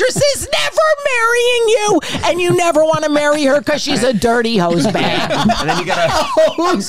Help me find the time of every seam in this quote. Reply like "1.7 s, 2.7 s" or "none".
none